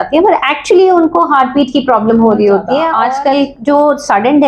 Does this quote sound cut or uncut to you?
cut